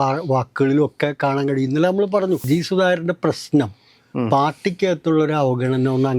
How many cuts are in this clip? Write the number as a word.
one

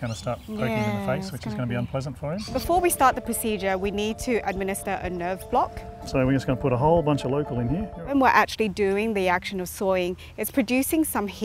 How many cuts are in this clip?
two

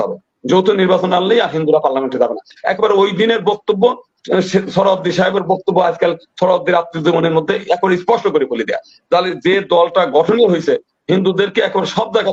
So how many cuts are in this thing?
zero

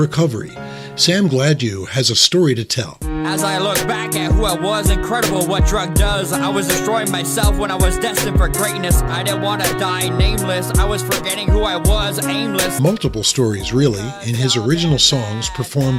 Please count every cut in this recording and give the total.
zero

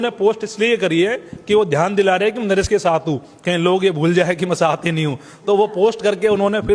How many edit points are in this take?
zero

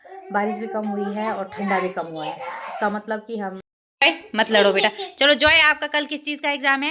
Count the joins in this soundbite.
one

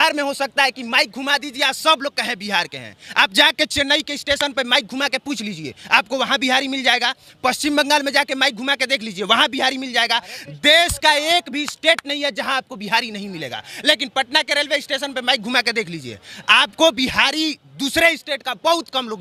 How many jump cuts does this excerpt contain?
zero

